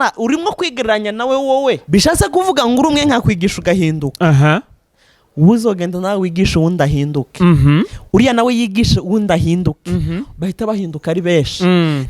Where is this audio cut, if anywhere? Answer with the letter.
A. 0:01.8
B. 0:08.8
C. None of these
A